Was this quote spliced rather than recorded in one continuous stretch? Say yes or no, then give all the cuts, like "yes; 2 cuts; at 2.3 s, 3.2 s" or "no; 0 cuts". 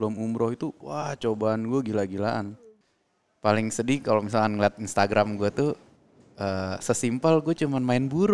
yes; 1 cut; at 2.7 s